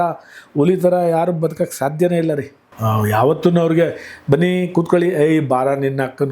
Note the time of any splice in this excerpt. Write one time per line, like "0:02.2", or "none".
0:02.6